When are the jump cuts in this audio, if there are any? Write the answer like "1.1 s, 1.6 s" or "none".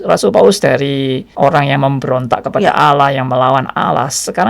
1.2 s